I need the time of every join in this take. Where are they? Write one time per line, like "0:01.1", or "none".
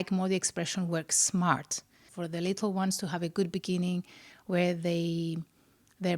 0:02.1

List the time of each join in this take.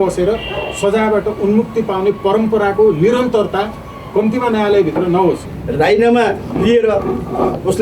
0:05.5

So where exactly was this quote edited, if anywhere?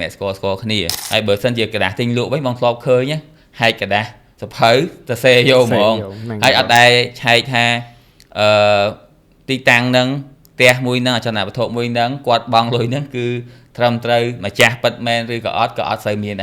0:00.9

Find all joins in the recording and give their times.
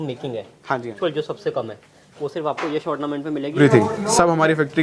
0:00.9
0:03.6

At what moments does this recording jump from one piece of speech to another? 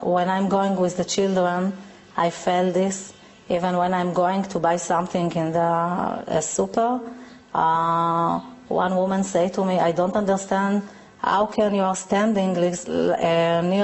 0:04.0

